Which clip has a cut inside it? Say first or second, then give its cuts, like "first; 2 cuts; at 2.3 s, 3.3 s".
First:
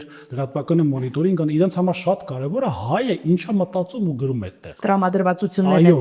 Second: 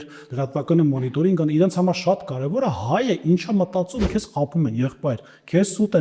second; 1 cut; at 4.1 s